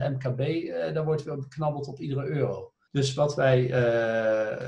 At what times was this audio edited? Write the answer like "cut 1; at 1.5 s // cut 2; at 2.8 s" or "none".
cut 1; at 2.7 s